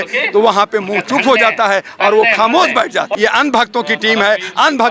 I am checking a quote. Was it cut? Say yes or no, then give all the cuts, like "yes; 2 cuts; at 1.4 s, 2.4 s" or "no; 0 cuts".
yes; 1 cut; at 3.1 s